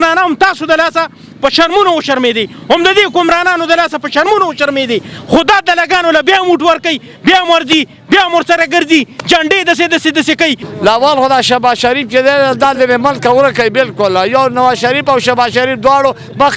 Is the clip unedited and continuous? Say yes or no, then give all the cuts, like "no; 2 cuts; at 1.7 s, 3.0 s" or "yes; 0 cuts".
no; 1 cut; at 10.7 s